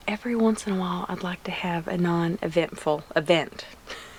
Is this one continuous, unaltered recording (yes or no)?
yes